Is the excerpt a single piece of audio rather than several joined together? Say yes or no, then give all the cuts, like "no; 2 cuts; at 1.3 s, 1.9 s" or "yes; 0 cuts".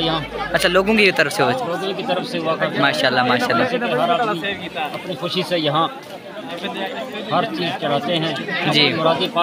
yes; 0 cuts